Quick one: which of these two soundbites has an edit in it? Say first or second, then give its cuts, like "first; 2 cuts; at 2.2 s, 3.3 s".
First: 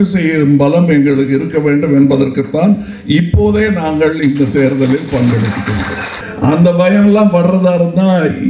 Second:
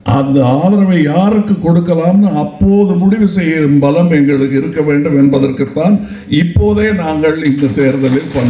first; 1 cut; at 6.2 s